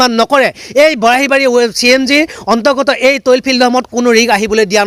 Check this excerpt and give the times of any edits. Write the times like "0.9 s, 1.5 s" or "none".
none